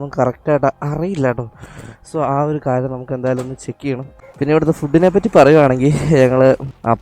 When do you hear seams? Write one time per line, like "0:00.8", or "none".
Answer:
0:04.2